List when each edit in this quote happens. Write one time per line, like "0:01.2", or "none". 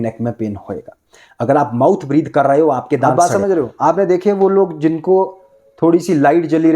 0:03.1

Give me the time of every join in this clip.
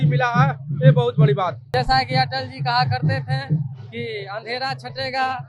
0:01.7

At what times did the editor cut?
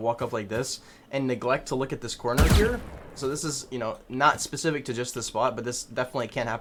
none

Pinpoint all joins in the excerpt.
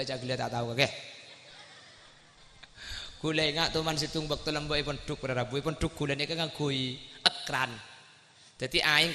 0:02.4

